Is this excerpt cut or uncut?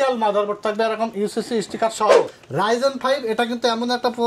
cut